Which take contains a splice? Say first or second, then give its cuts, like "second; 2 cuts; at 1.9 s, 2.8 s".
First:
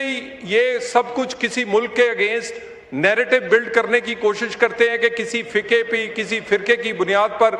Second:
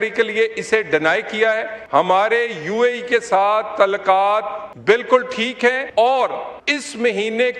second; 4 cuts; at 1.8 s, 4.6 s, 5.8 s, 6.5 s